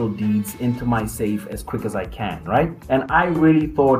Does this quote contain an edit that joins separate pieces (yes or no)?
yes